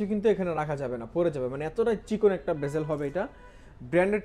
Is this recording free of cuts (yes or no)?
yes